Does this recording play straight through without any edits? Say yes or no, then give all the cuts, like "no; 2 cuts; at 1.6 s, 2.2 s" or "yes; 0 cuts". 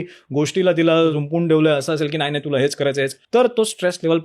no; 2 cuts; at 1.2 s, 3.2 s